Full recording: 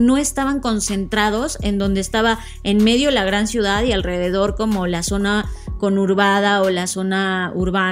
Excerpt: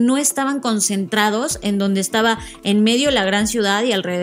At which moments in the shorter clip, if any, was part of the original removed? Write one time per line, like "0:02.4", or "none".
none